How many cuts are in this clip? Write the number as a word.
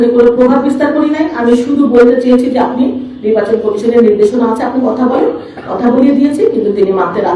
zero